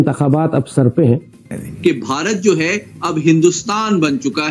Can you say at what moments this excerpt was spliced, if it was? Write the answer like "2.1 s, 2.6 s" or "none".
1.7 s